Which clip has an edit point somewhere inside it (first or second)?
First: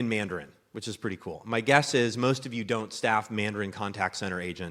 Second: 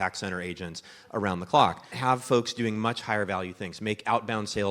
second